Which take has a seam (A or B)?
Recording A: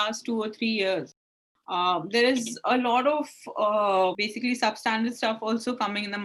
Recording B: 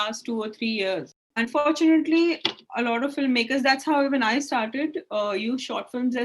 B